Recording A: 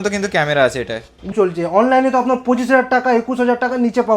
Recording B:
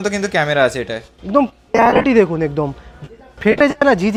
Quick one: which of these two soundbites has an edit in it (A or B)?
A